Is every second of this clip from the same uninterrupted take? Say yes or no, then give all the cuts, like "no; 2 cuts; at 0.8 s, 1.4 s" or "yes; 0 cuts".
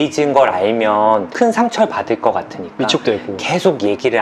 yes; 0 cuts